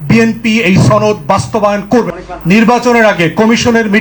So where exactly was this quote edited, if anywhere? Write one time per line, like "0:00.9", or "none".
0:02.1